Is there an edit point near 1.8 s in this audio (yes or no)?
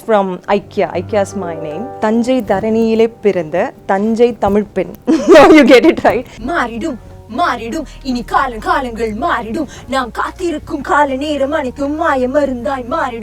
yes